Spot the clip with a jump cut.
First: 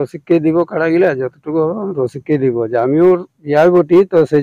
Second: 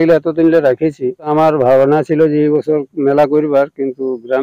second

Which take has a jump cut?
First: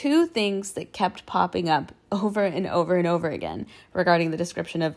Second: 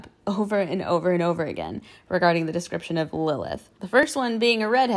second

